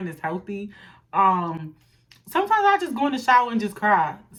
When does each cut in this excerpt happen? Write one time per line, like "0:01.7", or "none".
none